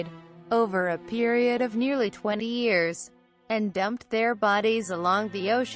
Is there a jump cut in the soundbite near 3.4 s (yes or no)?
yes